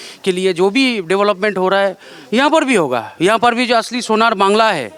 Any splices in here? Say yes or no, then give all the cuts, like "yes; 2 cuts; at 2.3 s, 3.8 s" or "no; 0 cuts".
no; 0 cuts